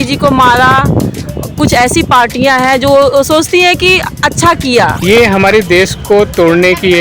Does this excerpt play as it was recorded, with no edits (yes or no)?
no